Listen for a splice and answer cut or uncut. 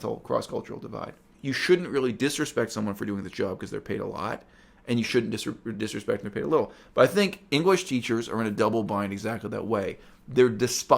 cut